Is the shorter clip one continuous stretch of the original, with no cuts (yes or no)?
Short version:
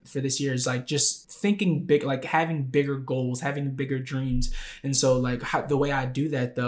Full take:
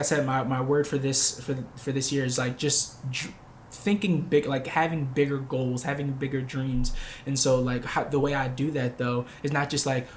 no